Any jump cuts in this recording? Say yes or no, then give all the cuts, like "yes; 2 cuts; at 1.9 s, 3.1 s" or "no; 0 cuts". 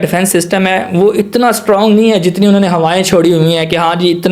no; 0 cuts